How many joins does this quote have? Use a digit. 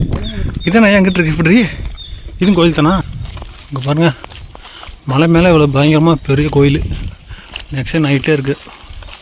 1